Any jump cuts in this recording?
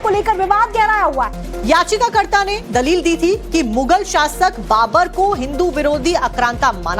yes; 1 cut; at 4.3 s

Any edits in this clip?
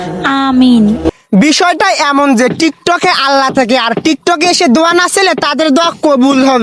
no; 0 cuts

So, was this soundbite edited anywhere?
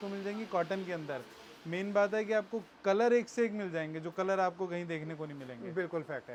no; 0 cuts

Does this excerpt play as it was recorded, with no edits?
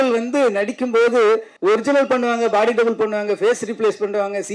no; 1 cut; at 1.5 s

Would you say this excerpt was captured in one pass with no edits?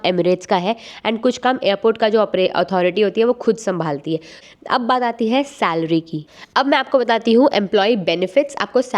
no; 2 cuts; at 4.3 s, 6.2 s

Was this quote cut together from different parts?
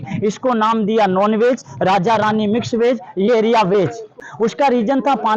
yes; 1 cut; at 4.2 s

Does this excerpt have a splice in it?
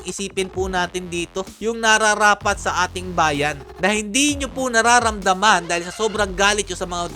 no; 0 cuts

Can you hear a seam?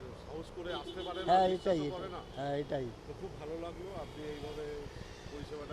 no; 0 cuts

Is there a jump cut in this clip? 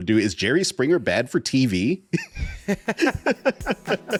no; 0 cuts

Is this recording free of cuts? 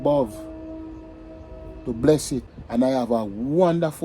no; 1 cut; at 2.6 s

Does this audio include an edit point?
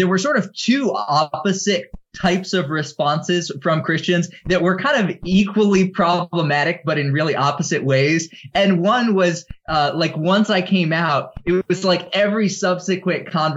no; 0 cuts

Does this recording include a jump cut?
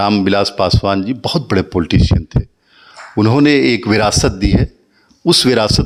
no; 0 cuts

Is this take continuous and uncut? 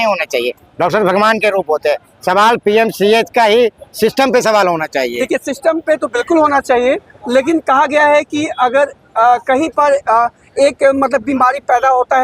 yes; 0 cuts

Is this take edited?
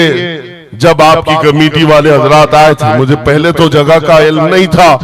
no; 0 cuts

